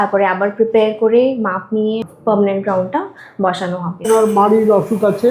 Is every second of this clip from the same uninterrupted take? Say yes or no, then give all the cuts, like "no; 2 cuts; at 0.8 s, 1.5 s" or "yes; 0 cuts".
no; 2 cuts; at 2.1 s, 4.0 s